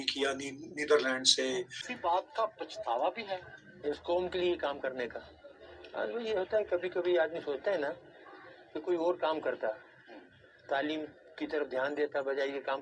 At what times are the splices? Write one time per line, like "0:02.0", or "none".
0:01.8